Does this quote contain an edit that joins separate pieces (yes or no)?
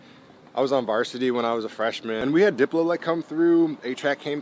yes